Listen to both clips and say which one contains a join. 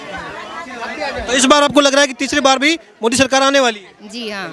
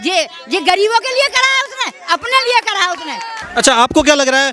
second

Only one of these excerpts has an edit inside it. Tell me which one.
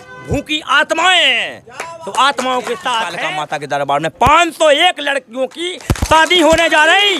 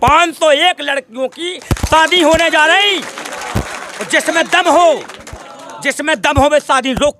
first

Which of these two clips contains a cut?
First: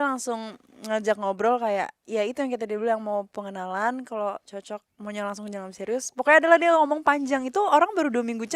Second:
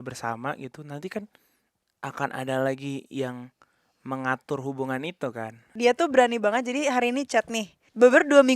second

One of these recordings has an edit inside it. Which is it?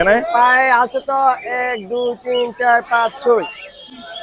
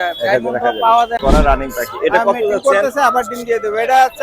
second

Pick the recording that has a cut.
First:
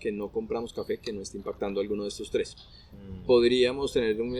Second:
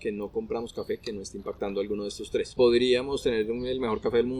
second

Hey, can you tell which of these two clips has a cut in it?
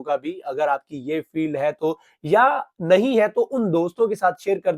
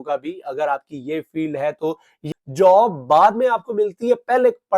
second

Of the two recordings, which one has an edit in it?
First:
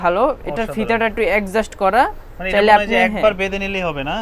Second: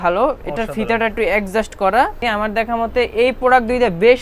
second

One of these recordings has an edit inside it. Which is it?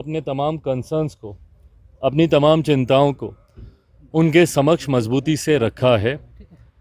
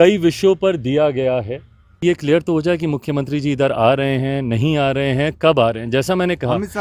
second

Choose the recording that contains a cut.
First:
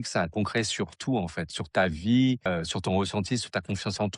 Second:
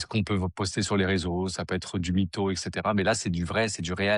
first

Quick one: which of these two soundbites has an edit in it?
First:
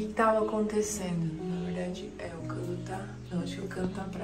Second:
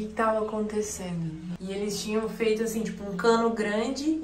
second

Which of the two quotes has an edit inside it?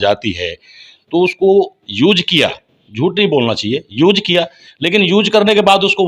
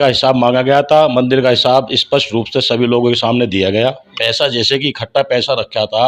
second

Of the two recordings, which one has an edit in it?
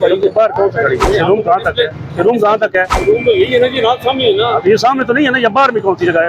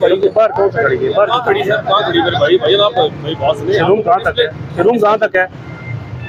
first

